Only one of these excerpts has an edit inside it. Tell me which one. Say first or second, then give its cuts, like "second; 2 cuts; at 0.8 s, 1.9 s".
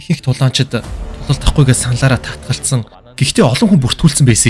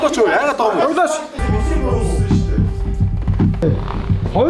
second; 1 cut; at 1.4 s